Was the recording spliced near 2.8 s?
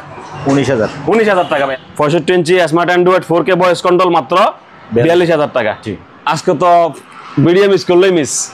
no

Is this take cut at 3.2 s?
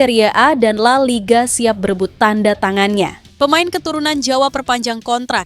yes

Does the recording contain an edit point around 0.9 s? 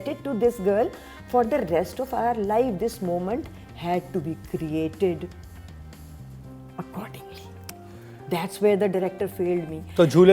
no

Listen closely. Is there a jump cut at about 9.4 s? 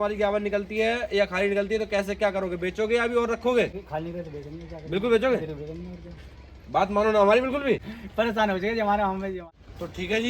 yes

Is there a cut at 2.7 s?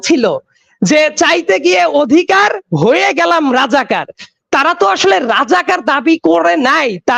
no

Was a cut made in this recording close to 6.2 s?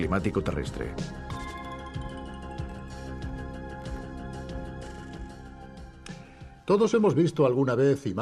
yes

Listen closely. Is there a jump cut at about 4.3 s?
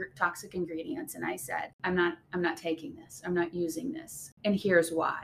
yes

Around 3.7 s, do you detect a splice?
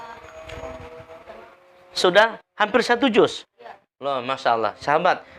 yes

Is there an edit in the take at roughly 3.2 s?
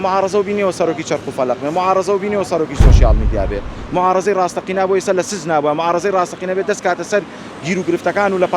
no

